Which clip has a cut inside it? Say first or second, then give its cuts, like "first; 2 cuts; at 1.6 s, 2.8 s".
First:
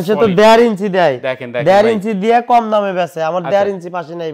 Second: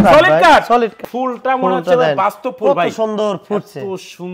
second; 1 cut; at 1.0 s